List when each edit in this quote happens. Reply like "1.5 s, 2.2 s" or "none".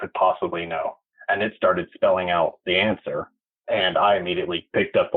1.1 s, 2.6 s

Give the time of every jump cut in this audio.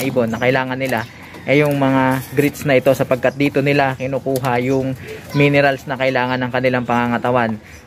none

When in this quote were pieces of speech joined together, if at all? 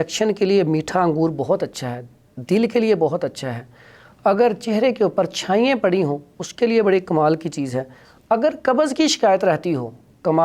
none

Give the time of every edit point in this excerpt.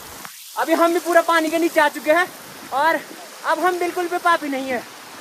none

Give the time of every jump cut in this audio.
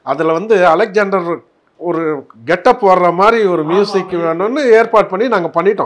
none

